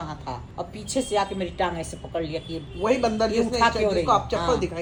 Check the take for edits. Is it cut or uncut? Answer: uncut